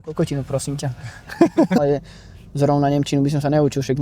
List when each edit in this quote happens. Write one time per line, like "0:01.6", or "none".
none